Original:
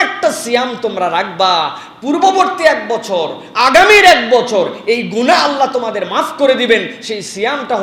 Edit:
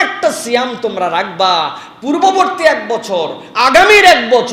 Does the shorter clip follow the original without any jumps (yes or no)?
yes